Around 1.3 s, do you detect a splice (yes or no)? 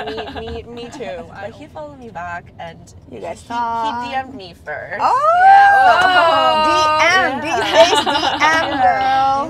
yes